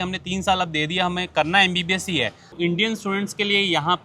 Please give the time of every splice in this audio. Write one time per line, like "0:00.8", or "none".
0:02.4